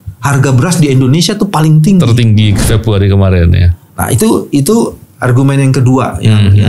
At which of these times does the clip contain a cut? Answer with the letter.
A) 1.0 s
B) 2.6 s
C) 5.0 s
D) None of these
D